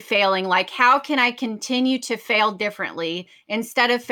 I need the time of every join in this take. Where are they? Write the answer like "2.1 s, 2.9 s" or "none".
none